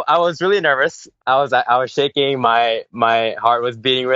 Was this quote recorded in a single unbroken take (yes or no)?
no